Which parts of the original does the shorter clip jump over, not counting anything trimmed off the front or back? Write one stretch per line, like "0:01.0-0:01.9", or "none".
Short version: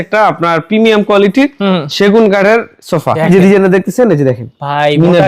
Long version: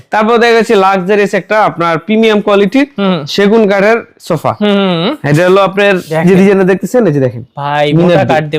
0:04.5-0:06.1